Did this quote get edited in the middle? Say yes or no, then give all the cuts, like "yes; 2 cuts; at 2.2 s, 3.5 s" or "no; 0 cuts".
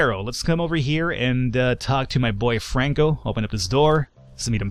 no; 0 cuts